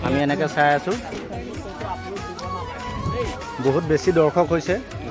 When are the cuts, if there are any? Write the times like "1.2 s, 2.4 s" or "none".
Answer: 1.1 s